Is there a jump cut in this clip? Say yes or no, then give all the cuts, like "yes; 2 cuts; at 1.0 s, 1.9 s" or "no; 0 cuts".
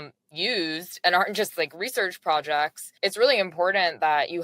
yes; 1 cut; at 2.8 s